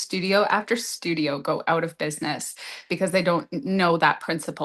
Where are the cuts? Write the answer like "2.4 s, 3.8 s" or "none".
none